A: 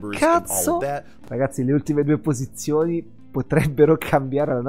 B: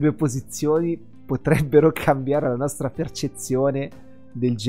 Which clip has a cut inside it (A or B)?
A